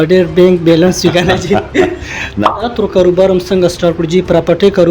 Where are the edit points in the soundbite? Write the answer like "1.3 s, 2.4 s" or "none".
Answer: 2.5 s